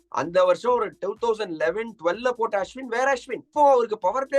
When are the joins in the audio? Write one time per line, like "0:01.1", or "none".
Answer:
0:03.4

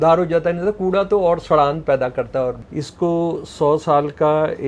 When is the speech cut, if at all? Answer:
0:02.6

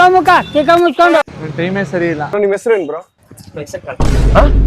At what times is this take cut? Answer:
0:02.3

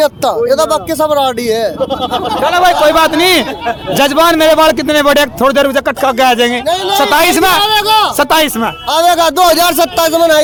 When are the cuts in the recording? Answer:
none

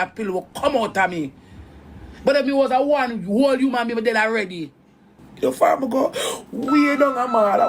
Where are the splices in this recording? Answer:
0:05.2

